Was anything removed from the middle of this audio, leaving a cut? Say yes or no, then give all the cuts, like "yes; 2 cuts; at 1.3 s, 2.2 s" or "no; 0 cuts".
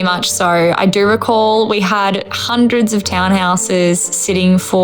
no; 0 cuts